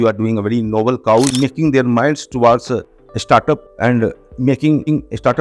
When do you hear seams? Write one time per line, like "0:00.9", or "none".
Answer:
0:01.3